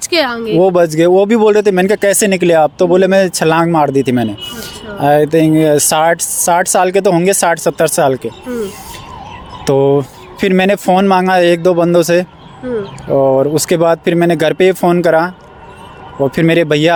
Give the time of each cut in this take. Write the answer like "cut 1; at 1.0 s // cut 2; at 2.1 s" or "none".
none